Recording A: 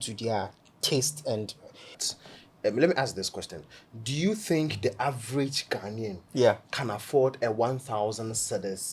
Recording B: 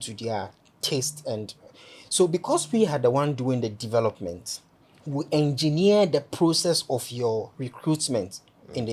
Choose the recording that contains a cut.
A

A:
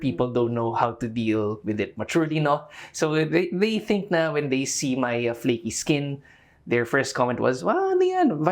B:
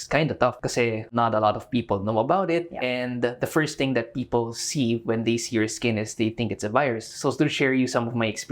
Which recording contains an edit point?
B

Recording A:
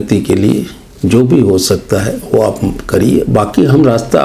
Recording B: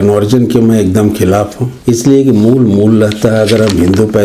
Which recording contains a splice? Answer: B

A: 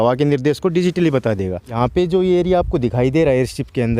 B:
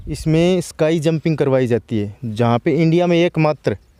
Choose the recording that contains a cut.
A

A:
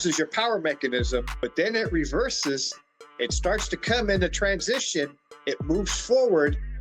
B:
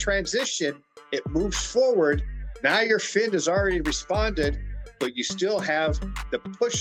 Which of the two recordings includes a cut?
A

